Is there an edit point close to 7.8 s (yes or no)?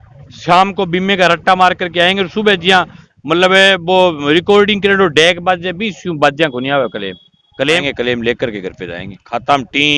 yes